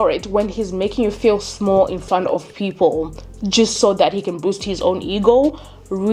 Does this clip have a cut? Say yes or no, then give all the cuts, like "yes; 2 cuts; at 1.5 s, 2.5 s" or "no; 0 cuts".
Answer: no; 0 cuts